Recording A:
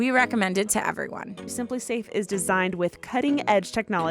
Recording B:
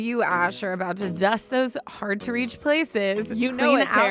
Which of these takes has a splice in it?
A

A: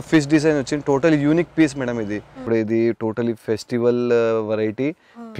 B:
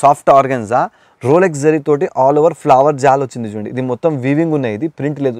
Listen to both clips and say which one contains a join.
A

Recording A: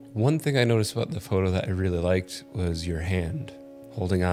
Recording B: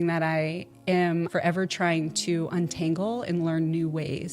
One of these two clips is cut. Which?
B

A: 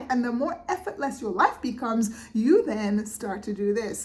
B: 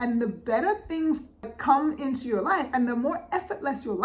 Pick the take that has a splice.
B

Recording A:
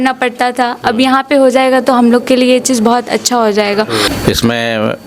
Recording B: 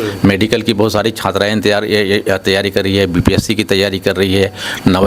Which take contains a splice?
A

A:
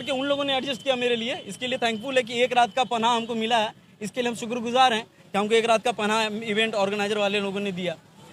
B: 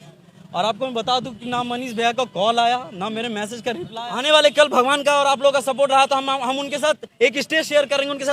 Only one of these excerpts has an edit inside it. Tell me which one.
B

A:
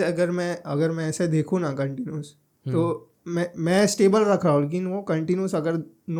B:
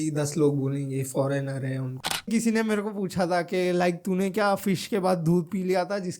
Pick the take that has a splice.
B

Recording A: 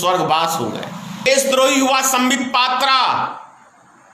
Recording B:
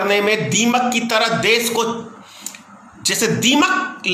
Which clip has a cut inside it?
A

